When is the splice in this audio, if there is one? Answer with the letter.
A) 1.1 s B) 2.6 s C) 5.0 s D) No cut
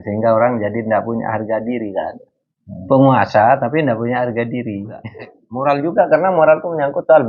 C